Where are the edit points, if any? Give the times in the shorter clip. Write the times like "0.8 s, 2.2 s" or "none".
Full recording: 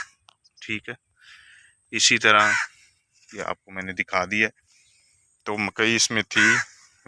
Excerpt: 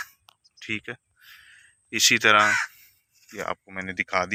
none

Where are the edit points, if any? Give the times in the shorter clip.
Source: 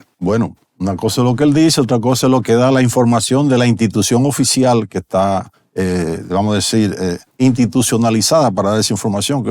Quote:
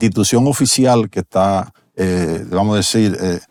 none

